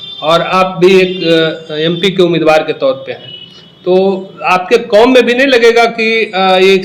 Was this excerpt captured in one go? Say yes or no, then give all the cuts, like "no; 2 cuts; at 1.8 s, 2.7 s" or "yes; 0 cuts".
yes; 0 cuts